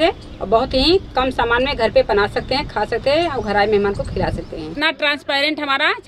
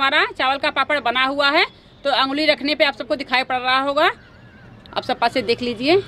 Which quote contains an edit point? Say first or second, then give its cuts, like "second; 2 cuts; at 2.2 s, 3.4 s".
first; 1 cut; at 4.7 s